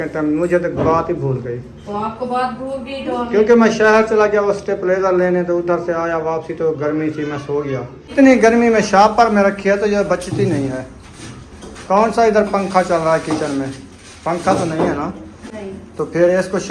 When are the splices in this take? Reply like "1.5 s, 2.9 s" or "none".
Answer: 8.1 s